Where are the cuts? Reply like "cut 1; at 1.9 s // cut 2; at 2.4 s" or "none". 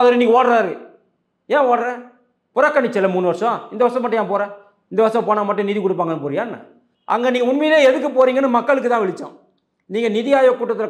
none